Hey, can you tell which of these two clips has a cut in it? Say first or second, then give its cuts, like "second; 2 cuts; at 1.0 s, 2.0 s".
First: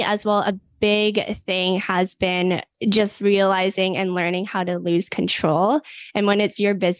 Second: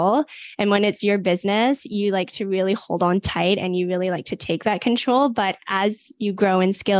first; 1 cut; at 2.7 s